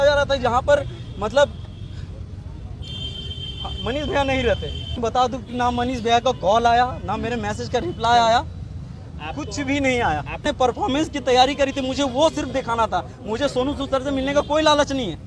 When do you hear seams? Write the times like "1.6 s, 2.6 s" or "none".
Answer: 5.0 s, 10.4 s